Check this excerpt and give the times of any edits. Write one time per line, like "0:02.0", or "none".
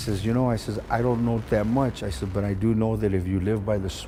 none